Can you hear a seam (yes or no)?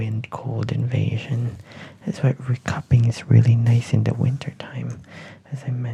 no